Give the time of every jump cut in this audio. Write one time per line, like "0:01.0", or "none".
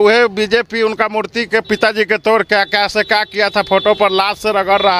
none